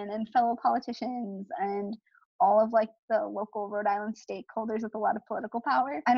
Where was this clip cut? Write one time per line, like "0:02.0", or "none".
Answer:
none

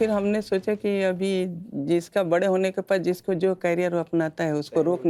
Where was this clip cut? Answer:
none

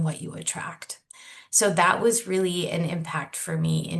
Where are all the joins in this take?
none

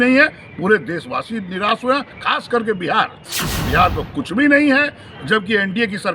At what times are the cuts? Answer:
0:03.2

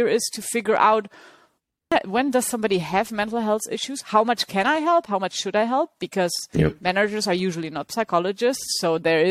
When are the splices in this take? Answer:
0:01.9

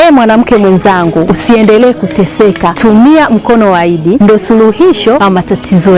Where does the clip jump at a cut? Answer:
0:01.3
0:02.7
0:04.2
0:05.2

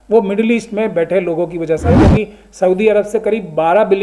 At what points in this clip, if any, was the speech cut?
0:02.0

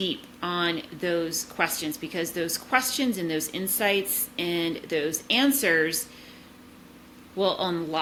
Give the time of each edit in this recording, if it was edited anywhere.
none

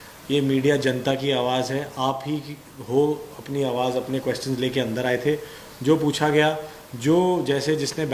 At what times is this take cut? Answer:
none

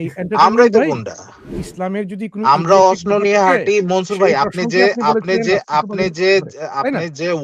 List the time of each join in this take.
0:01.6

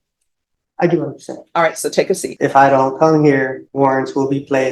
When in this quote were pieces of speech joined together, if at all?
0:02.3
0:03.6

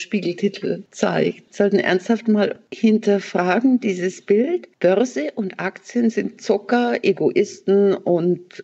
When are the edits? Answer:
0:01.1
0:02.6
0:04.7

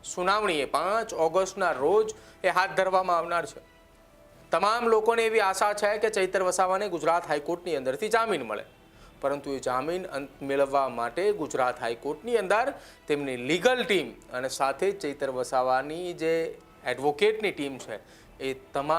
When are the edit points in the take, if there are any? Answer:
none

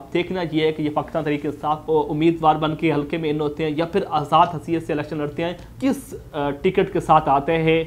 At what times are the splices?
0:01.8
0:05.6

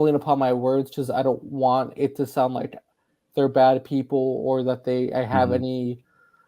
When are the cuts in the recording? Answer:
none

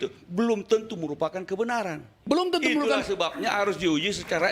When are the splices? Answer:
none

